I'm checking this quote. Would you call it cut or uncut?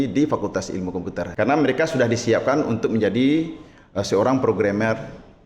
cut